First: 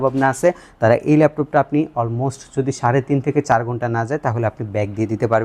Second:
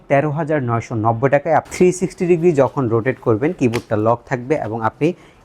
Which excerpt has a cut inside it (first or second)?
second